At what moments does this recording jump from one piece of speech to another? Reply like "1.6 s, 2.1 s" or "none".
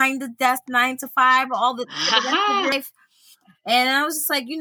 2.7 s